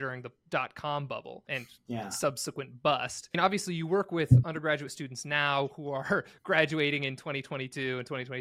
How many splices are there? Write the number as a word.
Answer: two